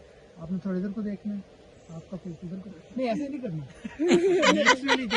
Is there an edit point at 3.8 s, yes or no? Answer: yes